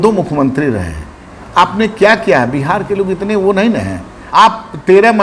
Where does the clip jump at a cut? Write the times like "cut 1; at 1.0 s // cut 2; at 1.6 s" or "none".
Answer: cut 1; at 4.2 s